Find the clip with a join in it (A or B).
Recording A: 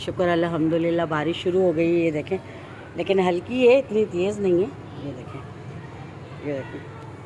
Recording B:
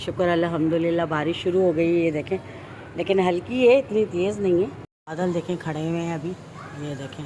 B